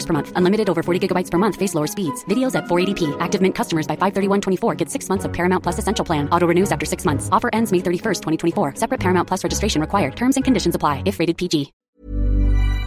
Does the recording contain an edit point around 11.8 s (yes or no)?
yes